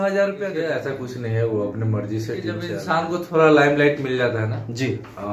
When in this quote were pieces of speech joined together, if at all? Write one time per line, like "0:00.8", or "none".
0:00.8
0:02.8